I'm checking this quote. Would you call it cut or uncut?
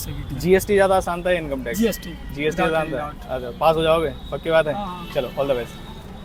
uncut